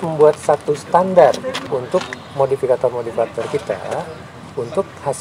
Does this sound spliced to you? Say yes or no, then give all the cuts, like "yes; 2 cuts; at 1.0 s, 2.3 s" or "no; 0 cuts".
yes; 1 cut; at 1.6 s